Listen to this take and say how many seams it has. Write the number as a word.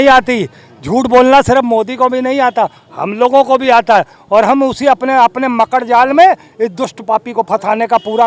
zero